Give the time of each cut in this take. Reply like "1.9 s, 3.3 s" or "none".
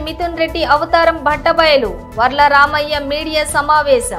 none